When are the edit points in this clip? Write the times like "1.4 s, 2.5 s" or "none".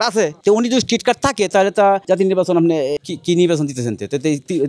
2.0 s, 3.0 s